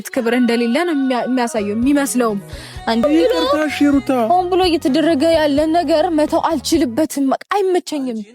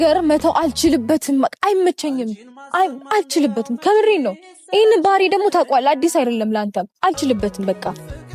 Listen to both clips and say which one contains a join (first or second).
first